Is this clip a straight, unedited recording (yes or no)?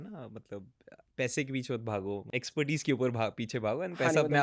no